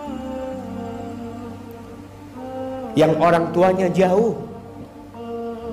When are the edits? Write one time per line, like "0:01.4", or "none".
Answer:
none